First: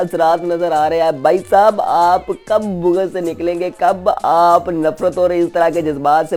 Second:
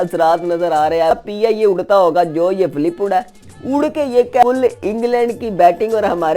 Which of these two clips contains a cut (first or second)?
second